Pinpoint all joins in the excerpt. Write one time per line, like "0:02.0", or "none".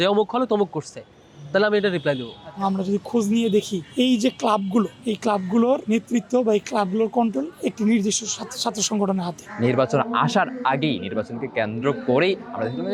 0:02.6
0:09.4